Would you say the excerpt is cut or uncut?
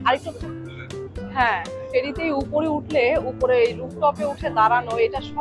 cut